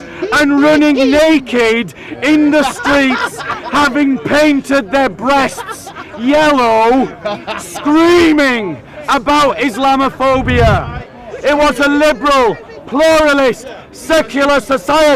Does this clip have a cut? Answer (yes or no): yes